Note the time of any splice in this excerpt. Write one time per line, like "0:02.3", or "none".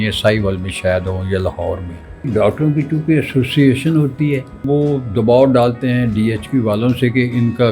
0:02.3
0:04.6